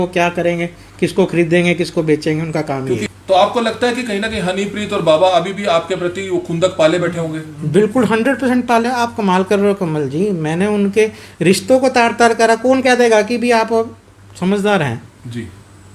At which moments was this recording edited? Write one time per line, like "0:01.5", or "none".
0:03.0